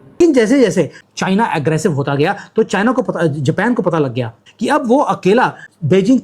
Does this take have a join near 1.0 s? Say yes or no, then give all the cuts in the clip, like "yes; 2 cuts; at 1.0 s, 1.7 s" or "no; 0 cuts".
yes; 1 cut; at 1.0 s